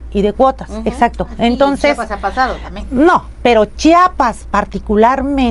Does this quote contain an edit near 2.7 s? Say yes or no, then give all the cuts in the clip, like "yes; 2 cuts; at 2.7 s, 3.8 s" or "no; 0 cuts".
no; 0 cuts